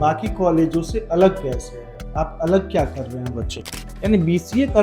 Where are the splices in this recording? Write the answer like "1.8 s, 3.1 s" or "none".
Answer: 3.8 s